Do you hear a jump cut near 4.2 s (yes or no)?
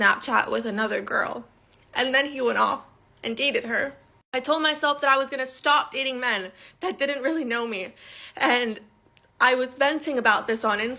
no